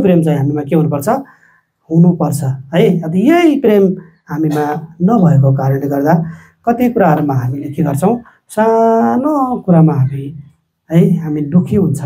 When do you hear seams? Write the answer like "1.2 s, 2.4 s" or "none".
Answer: none